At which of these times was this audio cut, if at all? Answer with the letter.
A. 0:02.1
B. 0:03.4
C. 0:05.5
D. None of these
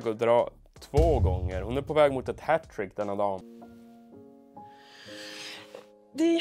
B